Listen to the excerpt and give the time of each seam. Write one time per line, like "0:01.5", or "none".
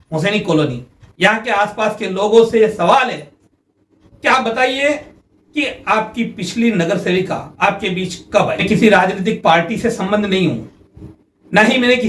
0:08.6